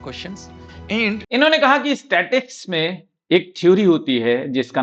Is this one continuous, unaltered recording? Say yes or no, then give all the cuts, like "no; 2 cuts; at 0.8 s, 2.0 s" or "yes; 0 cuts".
yes; 0 cuts